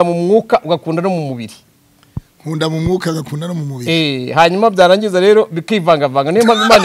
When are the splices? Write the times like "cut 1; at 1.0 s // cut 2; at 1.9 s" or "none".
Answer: none